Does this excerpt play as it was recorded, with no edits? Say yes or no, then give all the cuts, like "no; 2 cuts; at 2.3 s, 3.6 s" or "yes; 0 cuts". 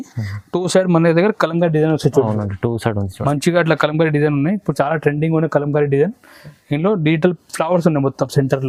yes; 0 cuts